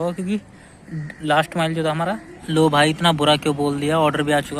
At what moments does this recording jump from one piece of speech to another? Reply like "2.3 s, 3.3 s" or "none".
2.3 s